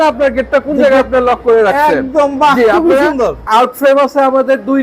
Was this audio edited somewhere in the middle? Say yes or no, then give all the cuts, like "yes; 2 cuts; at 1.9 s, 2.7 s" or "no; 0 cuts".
yes; 1 cut; at 3.5 s